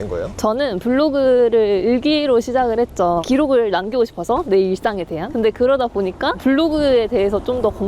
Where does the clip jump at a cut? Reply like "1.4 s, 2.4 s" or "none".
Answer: none